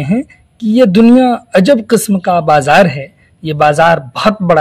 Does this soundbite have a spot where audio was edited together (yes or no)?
no